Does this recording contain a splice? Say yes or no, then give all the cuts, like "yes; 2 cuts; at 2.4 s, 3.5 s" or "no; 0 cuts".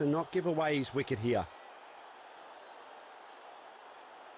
yes; 1 cut; at 1.4 s